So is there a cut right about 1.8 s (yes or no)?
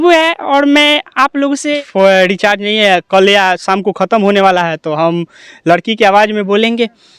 yes